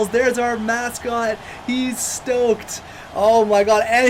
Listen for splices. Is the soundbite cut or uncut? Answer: uncut